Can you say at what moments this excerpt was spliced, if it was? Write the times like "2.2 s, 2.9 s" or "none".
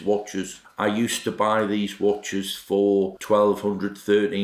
none